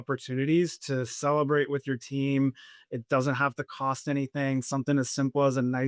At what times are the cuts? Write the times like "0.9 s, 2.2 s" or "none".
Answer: none